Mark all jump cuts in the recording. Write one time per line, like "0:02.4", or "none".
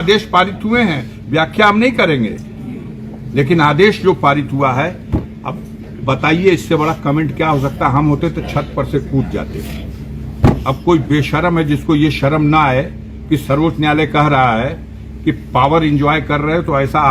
none